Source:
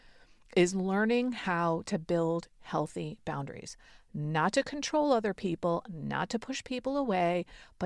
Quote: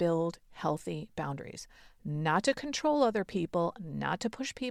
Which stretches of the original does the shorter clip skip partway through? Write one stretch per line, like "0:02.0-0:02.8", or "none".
none